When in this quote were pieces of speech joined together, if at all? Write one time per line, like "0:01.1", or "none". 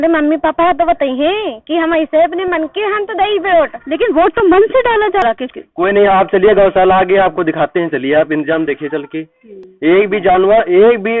0:05.2